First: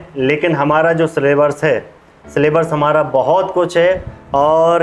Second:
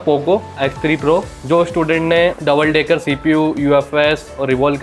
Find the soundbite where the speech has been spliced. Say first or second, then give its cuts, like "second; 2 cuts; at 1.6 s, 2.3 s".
second; 2 cuts; at 1.3 s, 2.4 s